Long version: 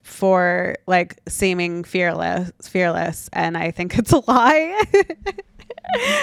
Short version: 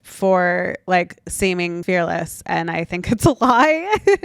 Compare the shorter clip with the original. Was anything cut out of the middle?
yes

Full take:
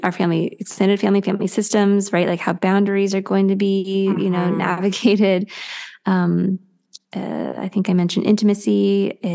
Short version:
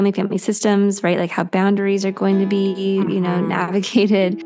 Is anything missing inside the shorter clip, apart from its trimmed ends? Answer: no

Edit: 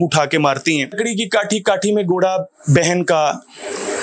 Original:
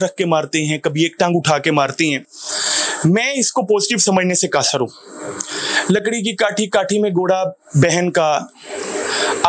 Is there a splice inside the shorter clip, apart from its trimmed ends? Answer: yes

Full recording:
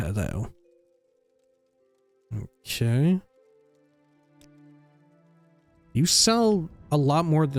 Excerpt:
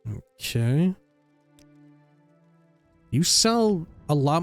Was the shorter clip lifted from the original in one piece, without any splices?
no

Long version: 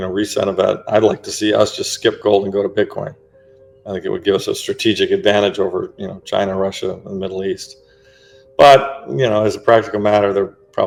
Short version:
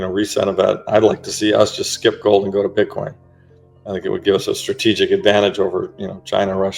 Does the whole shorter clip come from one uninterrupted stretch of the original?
yes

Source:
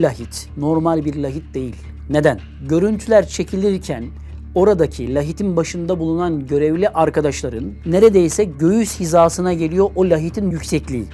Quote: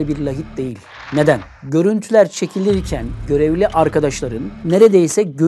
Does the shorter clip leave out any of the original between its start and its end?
yes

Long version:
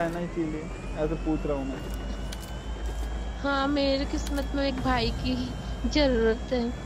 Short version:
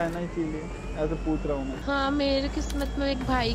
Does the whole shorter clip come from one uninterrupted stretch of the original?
no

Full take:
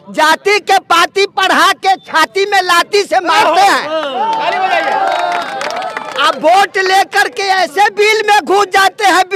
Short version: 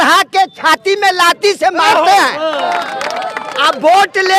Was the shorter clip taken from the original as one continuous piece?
no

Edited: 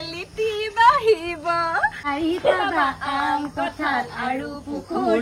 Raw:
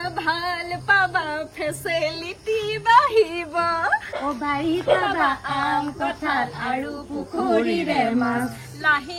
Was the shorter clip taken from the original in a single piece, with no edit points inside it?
no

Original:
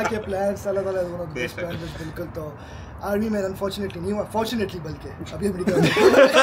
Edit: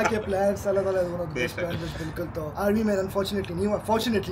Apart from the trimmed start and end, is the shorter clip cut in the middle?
yes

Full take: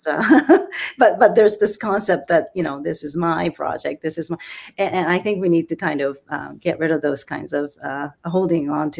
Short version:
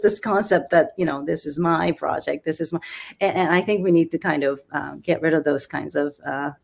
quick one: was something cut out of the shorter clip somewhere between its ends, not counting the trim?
no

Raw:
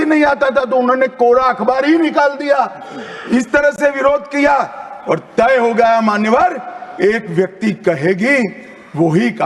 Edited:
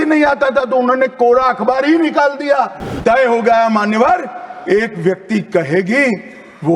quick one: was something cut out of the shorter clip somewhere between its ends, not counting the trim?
yes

